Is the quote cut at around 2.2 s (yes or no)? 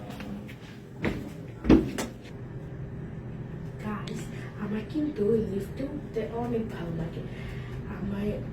yes